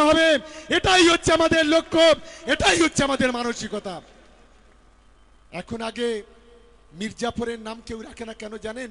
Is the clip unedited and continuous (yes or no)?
yes